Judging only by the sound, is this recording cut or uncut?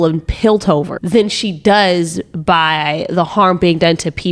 cut